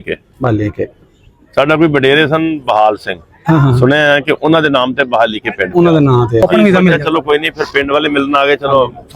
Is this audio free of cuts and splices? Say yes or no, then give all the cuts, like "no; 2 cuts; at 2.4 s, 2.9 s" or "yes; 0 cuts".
no; 1 cut; at 6.4 s